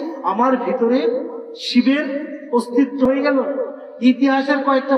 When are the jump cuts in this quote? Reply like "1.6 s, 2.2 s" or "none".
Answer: 3.1 s